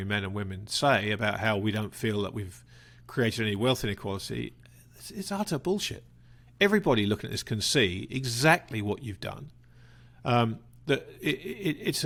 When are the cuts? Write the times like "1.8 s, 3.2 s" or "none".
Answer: none